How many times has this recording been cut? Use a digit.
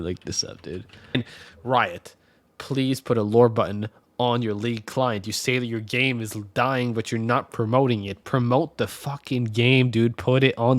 1